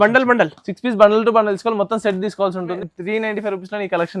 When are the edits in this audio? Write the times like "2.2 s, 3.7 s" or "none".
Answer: 2.8 s

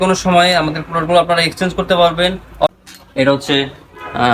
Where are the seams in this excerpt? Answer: 2.7 s

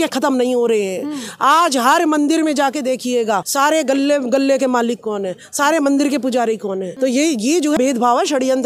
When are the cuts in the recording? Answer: 3.5 s, 6.9 s, 7.8 s

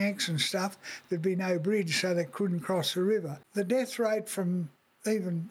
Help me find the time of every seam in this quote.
3.4 s

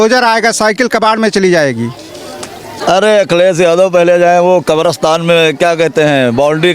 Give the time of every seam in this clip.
2.7 s

